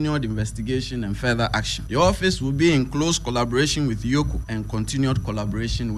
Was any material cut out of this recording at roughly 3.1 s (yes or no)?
no